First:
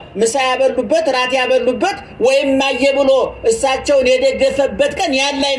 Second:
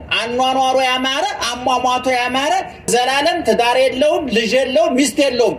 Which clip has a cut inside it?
second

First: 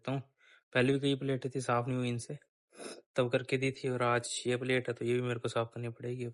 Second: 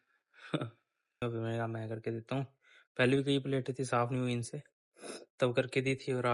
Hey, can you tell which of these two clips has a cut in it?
second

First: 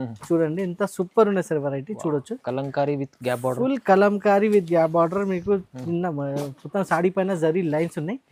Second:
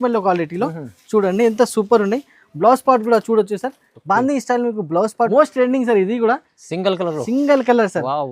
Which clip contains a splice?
second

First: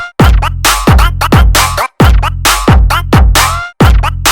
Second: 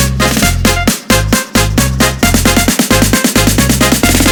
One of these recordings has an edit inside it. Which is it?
first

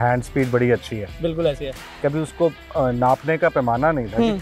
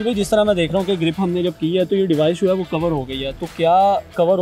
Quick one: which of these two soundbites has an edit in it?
first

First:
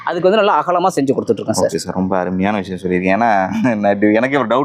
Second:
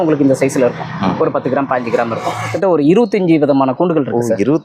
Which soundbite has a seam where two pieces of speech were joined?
second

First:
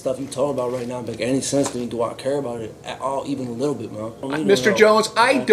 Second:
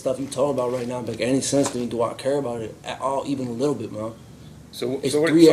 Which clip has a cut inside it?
first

